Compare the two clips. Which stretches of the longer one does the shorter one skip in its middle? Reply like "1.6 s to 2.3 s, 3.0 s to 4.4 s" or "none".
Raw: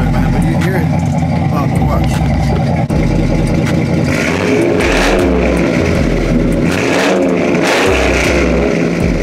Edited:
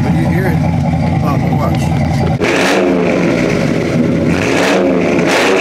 2.7 s to 4.8 s